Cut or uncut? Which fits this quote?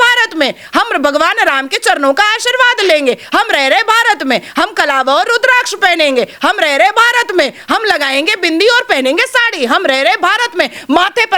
uncut